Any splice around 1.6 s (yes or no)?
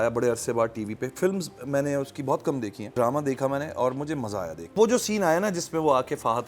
no